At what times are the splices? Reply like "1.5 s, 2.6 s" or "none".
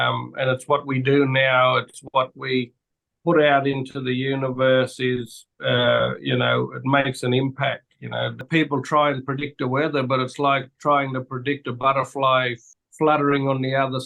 8.4 s, 12.6 s